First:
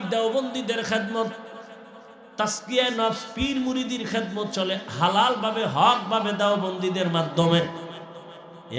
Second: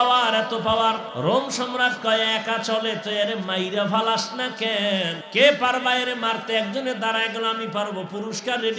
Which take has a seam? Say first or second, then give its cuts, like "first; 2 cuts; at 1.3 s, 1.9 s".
second; 2 cuts; at 1.1 s, 5.2 s